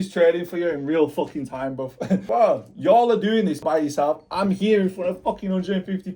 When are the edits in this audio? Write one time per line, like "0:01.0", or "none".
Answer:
0:02.2
0:03.6